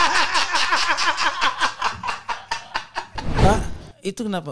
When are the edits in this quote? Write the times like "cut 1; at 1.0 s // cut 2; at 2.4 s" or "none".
cut 1; at 3.4 s